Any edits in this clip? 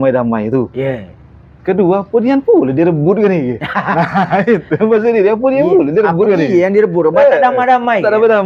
no; 0 cuts

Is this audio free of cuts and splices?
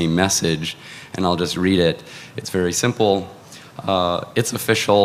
yes; 0 cuts

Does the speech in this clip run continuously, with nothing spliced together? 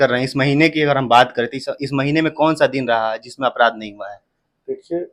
yes; 0 cuts

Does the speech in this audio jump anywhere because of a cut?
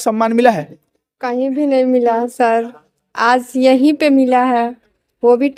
no; 0 cuts

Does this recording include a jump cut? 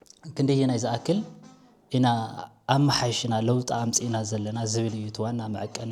no; 0 cuts

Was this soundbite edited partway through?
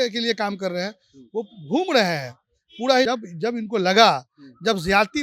yes; 1 cut; at 3.0 s

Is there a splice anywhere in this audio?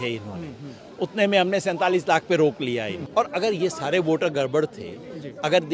yes; 1 cut; at 3.0 s

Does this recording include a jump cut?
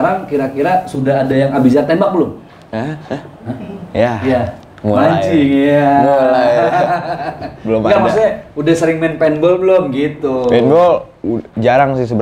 no; 0 cuts

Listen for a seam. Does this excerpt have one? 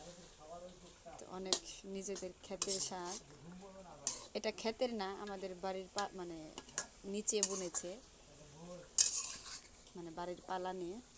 no; 0 cuts

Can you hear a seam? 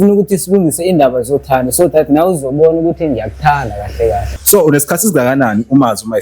yes; 1 cut; at 4.4 s

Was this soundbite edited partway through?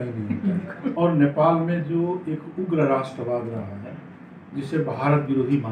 yes; 1 cut; at 0.9 s

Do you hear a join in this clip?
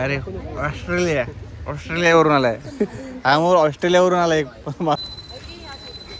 yes; 1 cut; at 5.0 s

